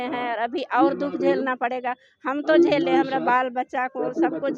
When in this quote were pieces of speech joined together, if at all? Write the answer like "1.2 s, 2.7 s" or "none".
none